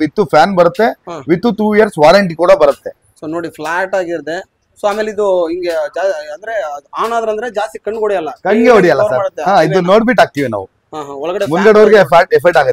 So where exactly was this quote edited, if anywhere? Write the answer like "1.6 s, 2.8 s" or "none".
none